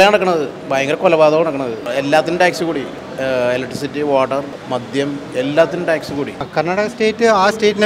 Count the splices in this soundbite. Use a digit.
4